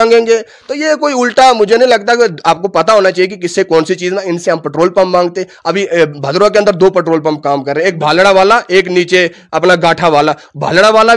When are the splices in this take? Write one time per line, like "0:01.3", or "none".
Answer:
none